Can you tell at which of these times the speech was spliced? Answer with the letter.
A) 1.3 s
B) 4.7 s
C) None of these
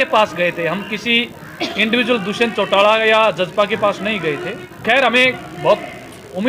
B